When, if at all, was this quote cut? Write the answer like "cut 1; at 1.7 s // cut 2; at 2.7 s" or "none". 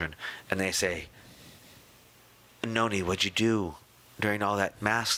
none